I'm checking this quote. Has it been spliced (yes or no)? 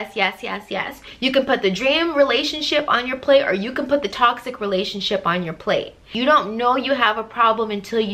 yes